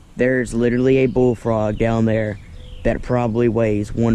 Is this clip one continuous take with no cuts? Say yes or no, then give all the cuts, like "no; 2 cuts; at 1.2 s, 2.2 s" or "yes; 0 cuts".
yes; 0 cuts